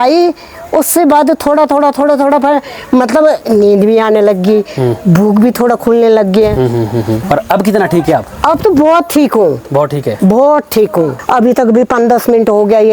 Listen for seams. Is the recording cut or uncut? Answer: cut